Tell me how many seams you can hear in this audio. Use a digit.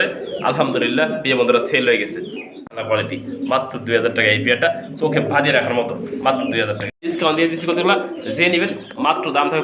2